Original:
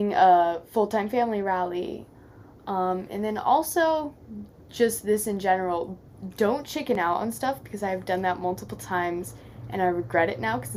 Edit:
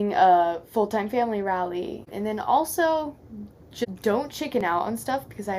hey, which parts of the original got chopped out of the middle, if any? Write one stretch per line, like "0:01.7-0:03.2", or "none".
0:02.1-0:03.1
0:04.8-0:06.2